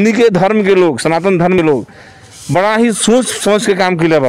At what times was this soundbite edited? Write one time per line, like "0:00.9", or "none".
0:01.6

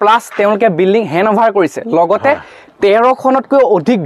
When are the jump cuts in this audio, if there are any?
none

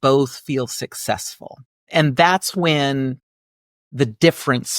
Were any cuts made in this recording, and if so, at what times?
0:01.9

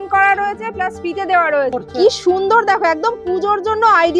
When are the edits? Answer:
0:01.8

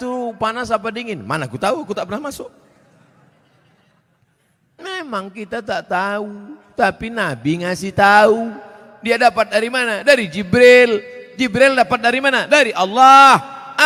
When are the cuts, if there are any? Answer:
none

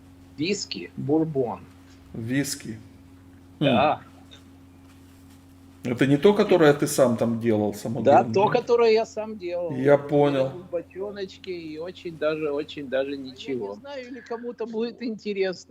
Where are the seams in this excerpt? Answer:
0:14.2

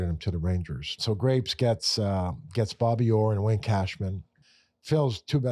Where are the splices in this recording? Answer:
0:00.9

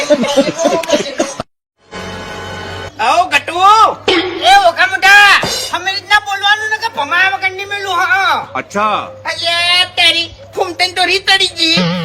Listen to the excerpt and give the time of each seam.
0:01.6

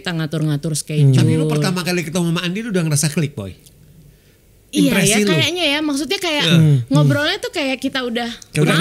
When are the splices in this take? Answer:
none

